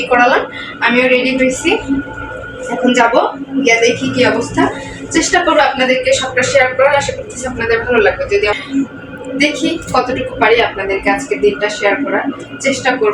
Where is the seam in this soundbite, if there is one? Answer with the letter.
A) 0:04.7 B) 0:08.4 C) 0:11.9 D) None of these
B